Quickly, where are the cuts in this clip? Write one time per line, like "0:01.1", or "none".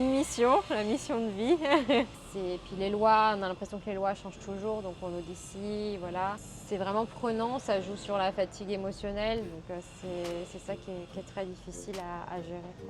0:02.2
0:06.5